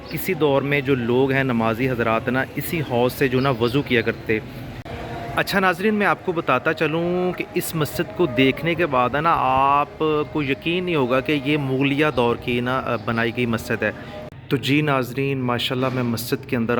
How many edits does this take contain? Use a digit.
2